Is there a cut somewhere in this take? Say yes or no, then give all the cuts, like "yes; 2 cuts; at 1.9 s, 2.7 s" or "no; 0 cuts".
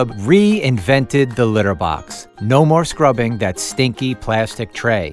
no; 0 cuts